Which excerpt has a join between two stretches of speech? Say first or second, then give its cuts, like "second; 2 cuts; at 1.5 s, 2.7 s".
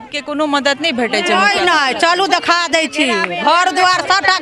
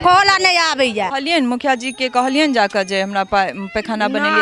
second; 1 cut; at 1.1 s